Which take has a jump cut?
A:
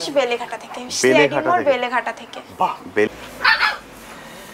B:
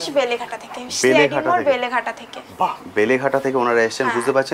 A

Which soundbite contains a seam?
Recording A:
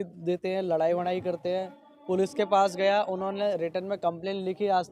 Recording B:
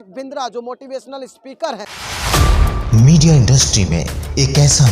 B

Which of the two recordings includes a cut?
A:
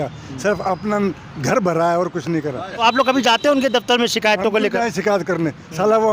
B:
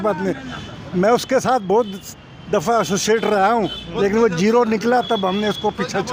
A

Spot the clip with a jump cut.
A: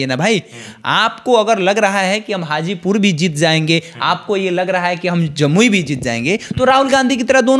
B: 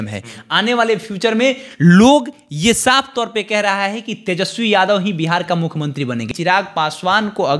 B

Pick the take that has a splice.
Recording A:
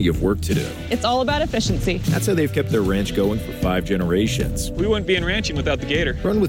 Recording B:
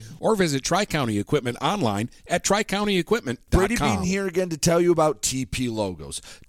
B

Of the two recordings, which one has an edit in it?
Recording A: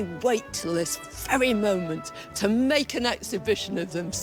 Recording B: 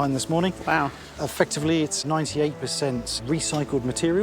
B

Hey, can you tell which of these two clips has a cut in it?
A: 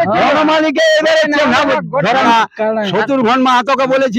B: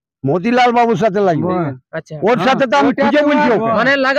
A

